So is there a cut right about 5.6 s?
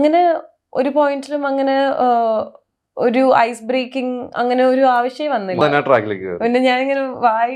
yes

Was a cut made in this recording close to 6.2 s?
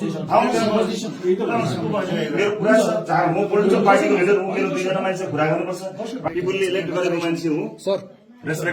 yes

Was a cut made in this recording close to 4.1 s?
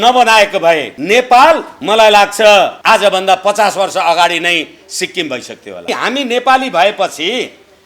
no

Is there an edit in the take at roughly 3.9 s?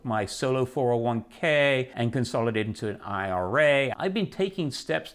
yes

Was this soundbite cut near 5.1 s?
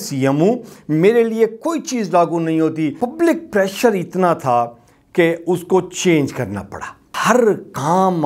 no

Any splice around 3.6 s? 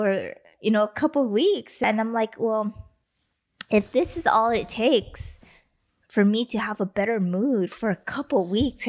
no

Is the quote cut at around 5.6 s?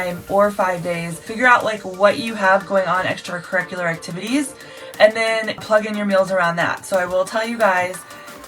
yes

